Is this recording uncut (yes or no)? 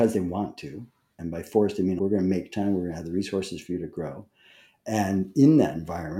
no